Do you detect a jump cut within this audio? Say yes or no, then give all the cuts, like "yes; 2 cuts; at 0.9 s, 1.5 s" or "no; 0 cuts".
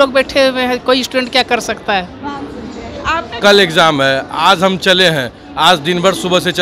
yes; 1 cut; at 3.3 s